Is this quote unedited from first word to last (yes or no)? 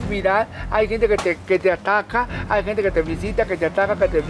yes